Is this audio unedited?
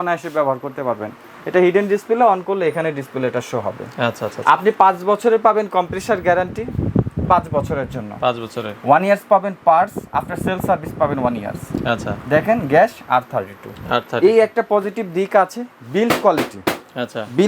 yes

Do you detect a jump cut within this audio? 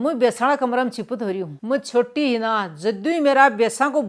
no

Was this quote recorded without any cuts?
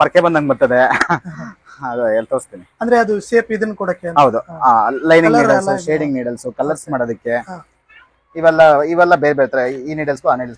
yes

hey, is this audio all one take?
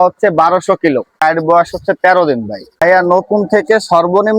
no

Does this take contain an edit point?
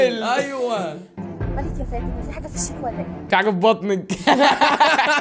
no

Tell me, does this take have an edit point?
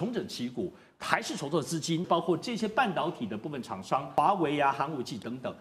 yes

